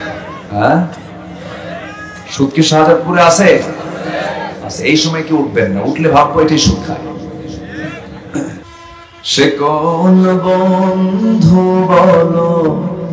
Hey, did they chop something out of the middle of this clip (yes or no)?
yes